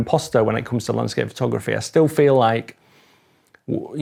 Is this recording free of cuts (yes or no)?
yes